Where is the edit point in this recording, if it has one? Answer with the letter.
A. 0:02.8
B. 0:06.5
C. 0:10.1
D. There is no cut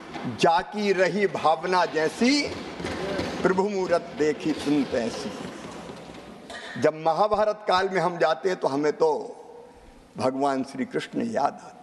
B